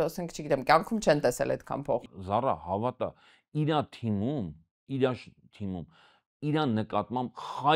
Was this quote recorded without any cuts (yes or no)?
no